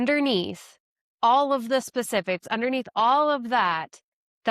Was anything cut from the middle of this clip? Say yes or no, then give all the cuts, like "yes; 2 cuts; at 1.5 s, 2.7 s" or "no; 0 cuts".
no; 0 cuts